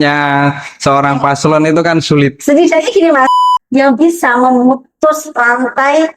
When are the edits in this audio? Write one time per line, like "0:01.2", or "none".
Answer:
0:03.3